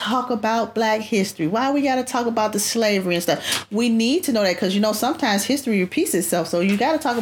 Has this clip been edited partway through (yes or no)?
no